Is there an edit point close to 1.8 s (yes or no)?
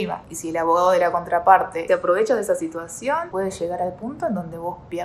yes